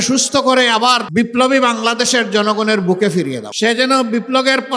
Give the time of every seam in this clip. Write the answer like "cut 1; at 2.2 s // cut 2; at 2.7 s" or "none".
cut 1; at 1.0 s // cut 2; at 3.5 s